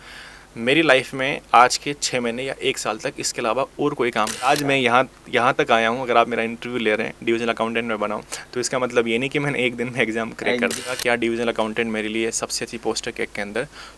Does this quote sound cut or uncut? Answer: cut